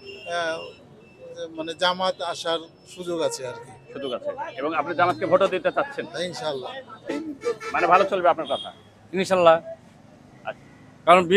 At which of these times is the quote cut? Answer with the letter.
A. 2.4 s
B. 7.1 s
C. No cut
B